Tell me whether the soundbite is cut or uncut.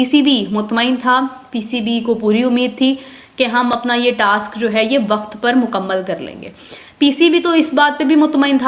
uncut